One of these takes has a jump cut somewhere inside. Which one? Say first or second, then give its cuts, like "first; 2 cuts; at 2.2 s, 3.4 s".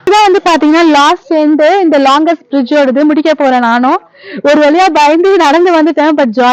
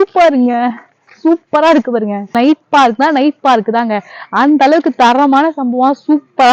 second; 1 cut; at 2.3 s